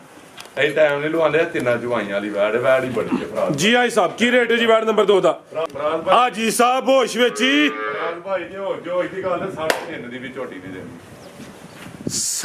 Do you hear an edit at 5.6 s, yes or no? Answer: yes